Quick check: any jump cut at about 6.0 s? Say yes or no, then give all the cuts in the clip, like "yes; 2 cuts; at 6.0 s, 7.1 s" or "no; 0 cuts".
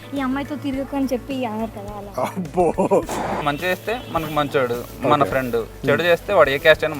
no; 1 cut; at 3.3 s